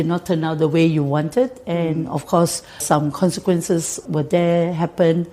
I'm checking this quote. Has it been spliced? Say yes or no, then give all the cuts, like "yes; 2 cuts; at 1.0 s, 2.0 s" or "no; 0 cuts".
yes; 2 cuts; at 2.8 s, 4.0 s